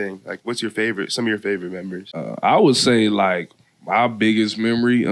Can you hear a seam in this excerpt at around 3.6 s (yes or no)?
no